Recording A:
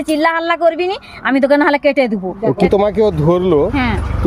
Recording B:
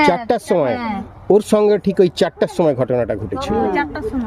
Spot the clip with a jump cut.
A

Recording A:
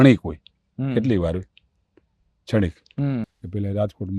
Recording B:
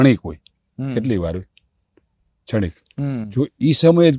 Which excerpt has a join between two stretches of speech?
A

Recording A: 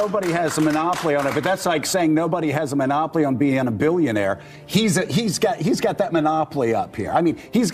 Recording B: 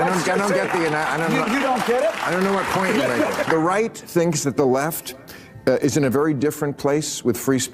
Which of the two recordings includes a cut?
B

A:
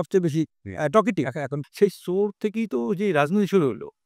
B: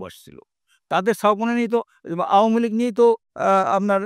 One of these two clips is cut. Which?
A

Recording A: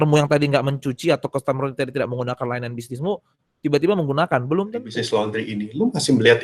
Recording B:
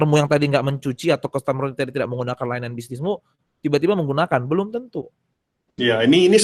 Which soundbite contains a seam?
A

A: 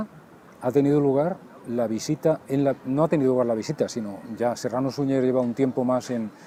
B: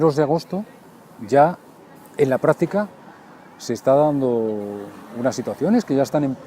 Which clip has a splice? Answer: B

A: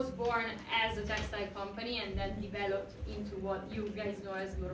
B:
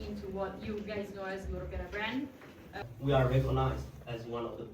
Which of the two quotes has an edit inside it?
B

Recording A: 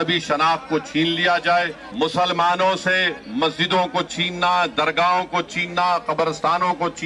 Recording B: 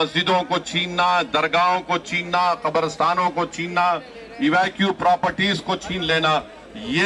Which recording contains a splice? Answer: A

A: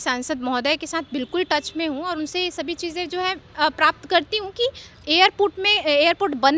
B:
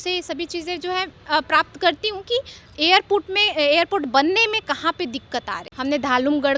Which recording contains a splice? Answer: B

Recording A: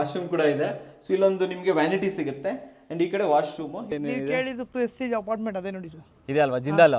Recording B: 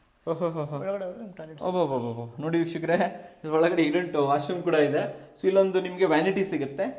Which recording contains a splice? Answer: A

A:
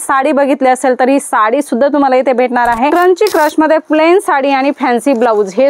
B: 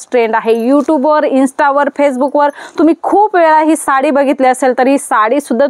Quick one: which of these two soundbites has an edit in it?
A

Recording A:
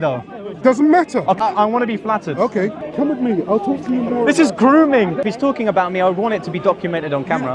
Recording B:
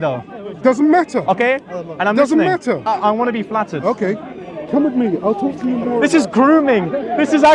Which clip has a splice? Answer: A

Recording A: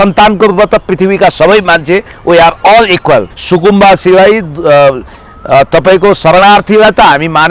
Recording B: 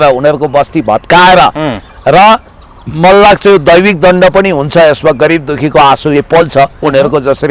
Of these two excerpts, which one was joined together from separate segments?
A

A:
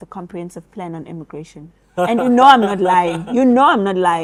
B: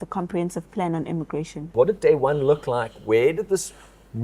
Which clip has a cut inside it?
B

